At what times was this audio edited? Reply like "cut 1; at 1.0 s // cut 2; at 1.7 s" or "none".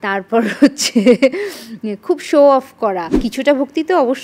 cut 1; at 3.3 s

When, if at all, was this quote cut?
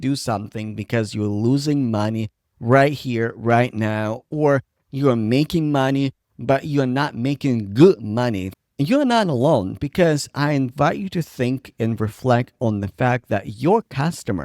cut 1; at 8.5 s

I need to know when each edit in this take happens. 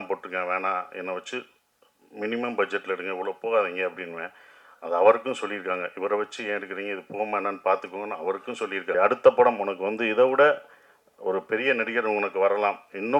cut 1; at 8.9 s

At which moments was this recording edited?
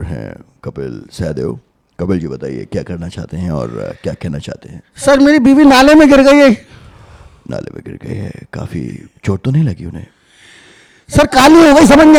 none

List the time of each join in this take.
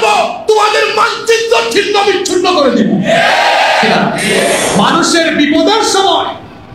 cut 1; at 4.4 s

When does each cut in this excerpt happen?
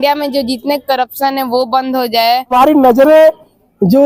cut 1; at 2.5 s

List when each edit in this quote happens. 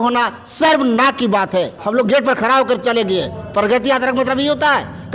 cut 1; at 1.8 s

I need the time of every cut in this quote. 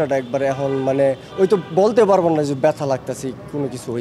none

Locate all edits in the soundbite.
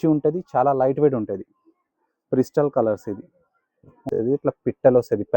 cut 1; at 4.1 s

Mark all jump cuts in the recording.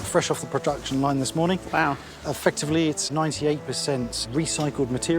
cut 1; at 3.1 s // cut 2; at 4.2 s

